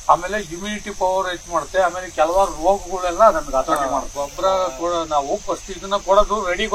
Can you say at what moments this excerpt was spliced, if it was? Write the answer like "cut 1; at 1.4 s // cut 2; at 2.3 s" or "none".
cut 1; at 4.2 s